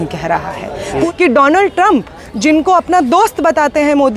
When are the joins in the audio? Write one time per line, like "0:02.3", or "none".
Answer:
0:00.9